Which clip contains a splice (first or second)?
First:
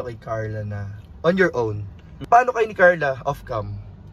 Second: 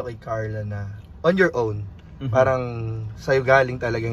first